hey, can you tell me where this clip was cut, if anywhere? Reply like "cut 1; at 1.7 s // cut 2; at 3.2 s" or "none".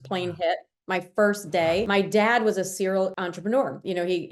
cut 1; at 1.9 s // cut 2; at 3.2 s